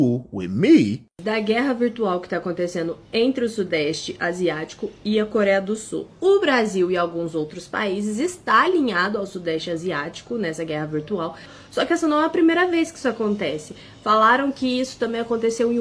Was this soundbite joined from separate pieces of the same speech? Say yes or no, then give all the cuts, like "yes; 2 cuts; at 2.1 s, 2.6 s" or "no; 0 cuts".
yes; 2 cuts; at 1.2 s, 11.5 s